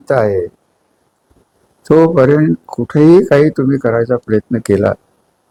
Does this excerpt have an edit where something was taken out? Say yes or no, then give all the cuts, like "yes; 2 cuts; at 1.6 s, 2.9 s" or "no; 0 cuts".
no; 0 cuts